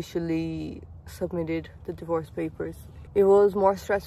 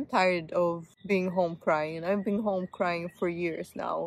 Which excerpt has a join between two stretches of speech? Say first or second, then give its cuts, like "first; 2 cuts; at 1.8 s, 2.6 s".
second; 1 cut; at 0.9 s